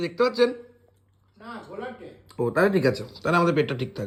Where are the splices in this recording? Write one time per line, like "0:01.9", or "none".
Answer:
none